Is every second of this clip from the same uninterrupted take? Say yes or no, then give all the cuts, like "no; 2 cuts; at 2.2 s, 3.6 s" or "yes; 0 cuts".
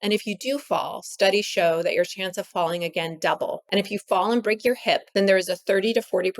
no; 2 cuts; at 3.6 s, 5.1 s